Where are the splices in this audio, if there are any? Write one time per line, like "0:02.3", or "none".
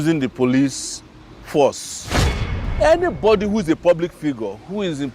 0:02.4